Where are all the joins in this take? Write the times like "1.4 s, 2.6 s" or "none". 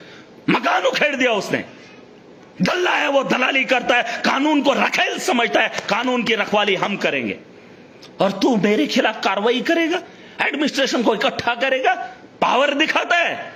none